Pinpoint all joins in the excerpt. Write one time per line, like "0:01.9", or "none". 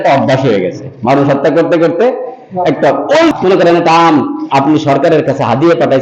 0:03.3

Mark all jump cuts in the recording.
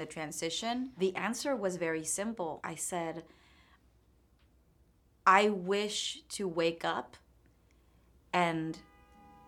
0:01.0
0:02.6

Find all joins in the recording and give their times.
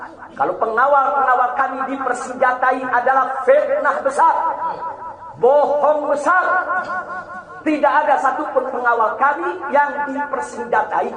none

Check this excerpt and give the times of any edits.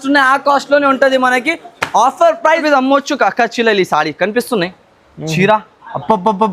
0:02.6

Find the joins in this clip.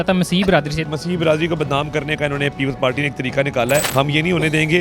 0:00.9
0:03.9

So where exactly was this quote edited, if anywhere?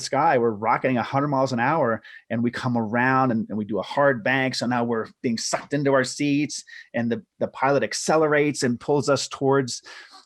none

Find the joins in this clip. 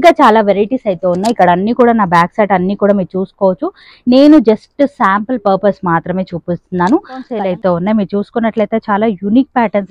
0:07.3

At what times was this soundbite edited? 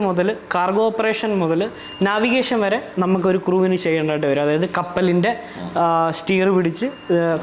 none

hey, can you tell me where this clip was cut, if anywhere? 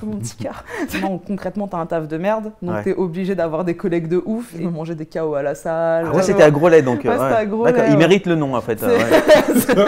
0:01.0
0:04.5
0:06.3

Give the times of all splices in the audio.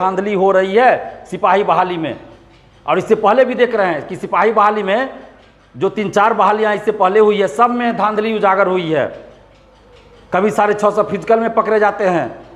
none

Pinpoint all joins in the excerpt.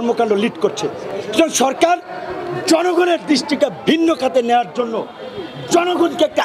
none

